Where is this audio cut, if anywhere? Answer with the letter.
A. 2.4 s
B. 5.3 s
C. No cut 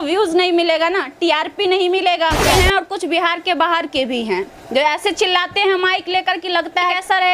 A